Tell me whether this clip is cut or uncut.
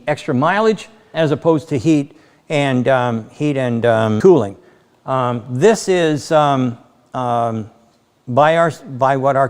cut